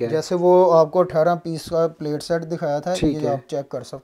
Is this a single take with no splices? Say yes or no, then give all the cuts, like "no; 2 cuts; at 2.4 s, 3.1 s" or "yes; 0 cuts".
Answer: yes; 0 cuts